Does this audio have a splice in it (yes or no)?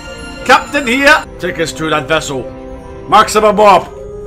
yes